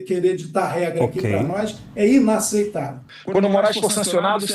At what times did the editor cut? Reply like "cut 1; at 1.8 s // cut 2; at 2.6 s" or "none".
cut 1; at 3.1 s